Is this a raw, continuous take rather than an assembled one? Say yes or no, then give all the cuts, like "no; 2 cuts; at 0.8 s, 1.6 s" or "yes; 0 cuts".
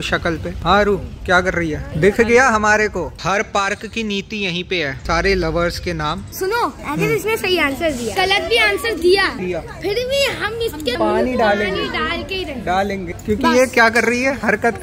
no; 5 cuts; at 3.2 s, 6.4 s, 8.1 s, 9.3 s, 13.1 s